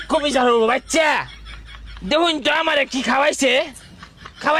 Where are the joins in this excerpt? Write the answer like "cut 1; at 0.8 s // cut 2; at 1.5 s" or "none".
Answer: none